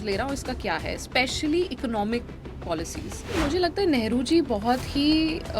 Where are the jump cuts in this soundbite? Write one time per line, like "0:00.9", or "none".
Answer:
0:03.4

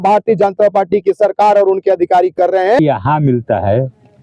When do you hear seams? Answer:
0:02.8

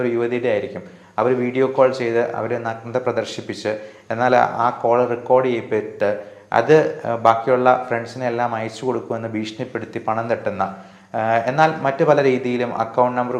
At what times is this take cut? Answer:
none

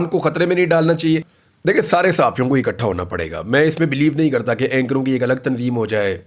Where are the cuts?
0:01.4

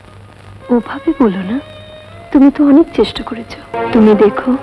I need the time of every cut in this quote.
0:03.7

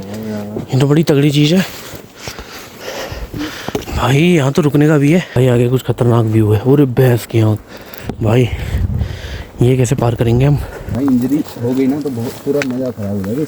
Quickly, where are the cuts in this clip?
0:05.4
0:10.8

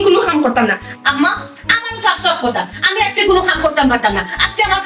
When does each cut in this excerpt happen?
0:00.9

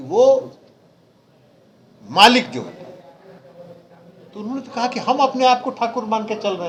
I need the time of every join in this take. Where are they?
none

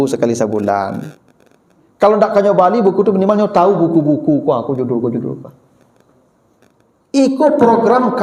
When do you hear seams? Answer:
none

